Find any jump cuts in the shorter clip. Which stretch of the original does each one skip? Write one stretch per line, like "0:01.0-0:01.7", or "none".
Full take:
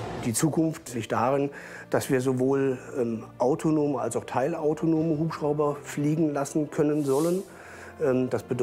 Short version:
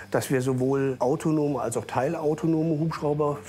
0:02.7-0:03.3